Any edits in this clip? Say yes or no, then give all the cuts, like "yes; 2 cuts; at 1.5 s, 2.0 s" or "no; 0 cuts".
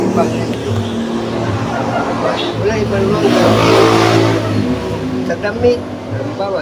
no; 0 cuts